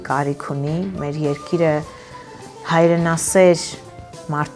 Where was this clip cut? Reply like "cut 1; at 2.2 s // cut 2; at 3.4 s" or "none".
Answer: none